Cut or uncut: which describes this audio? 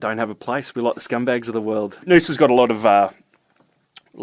cut